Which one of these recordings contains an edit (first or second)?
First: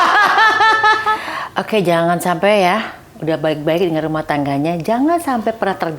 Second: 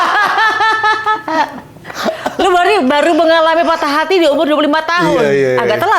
first